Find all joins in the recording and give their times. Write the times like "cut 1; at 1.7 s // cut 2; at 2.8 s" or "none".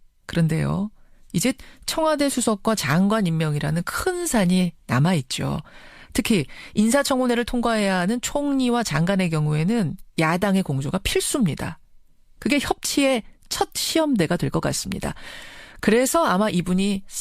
none